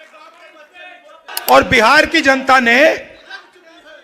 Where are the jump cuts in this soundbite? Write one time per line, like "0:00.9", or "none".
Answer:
0:01.3